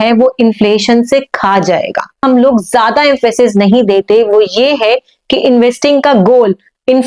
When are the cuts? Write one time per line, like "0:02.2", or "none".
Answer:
0:02.2